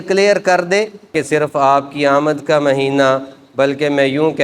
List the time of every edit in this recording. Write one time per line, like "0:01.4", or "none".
0:01.1